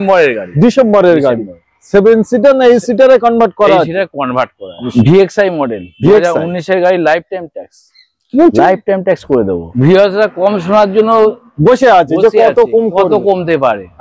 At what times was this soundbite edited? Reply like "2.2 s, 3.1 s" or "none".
4.8 s, 9.7 s